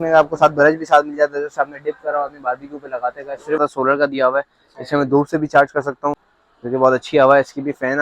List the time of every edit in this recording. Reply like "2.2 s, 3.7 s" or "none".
3.6 s, 6.3 s